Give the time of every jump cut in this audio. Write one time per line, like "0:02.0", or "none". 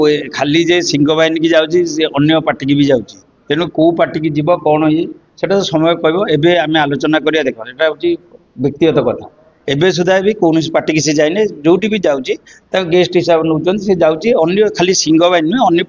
none

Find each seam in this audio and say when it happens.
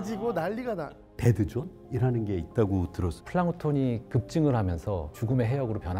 0:01.2
0:03.2
0:05.1

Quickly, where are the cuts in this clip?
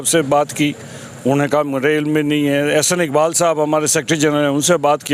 none

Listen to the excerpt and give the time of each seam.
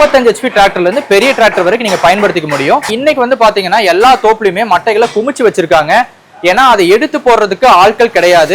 0:02.9

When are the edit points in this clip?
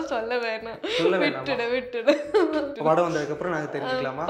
0:02.7

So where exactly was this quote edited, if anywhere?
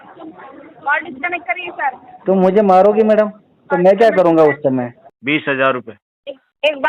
0:05.1

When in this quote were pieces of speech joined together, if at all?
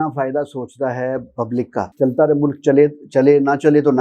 0:01.9

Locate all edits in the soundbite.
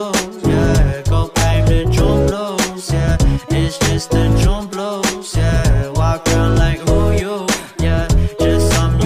0:01.3

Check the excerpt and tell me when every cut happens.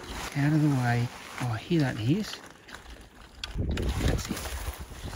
0:03.5

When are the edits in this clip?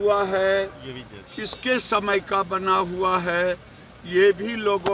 none

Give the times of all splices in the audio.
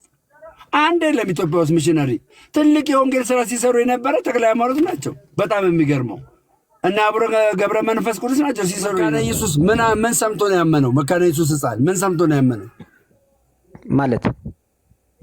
0:09.2

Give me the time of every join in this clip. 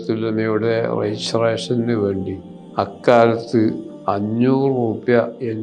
none

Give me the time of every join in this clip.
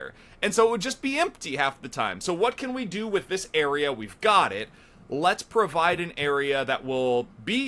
none

